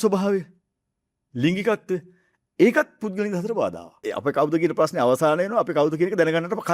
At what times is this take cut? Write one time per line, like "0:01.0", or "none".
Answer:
0:04.1

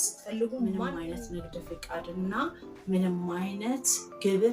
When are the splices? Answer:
0:00.9

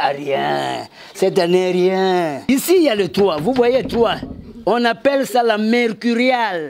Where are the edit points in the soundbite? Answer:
0:02.5

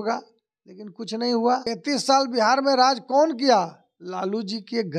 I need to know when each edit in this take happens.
0:01.6

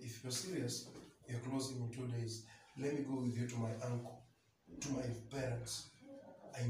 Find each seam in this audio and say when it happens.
none

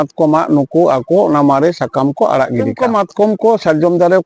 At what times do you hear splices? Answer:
0:02.8

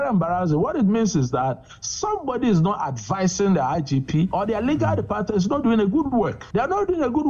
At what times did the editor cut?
0:04.3
0:06.4

